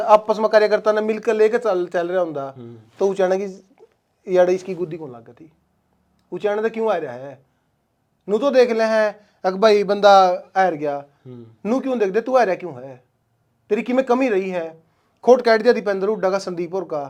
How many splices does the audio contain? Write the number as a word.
zero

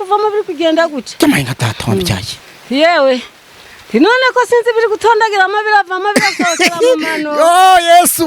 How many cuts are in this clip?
one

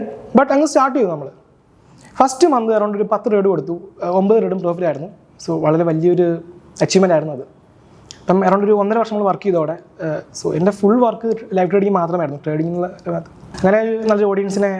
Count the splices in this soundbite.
zero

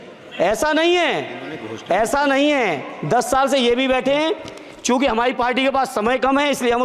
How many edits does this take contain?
zero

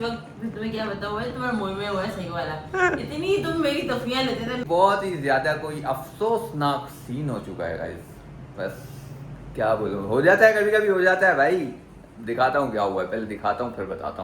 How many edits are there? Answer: one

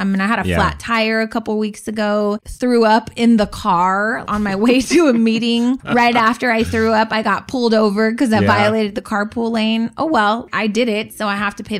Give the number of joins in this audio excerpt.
four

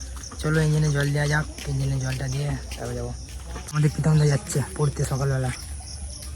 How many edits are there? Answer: one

